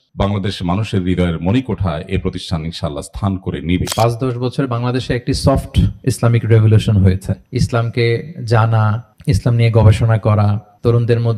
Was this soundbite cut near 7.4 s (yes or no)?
yes